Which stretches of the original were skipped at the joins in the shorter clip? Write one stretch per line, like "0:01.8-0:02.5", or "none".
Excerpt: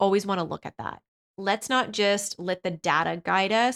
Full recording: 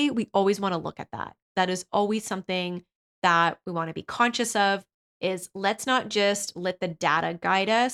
0:01.5-0:05.4